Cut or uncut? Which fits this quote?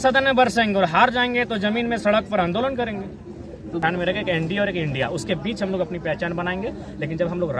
cut